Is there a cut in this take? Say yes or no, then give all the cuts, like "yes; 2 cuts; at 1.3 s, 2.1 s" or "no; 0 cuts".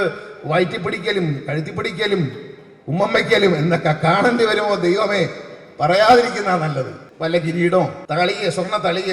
yes; 2 cuts; at 7.0 s, 8.0 s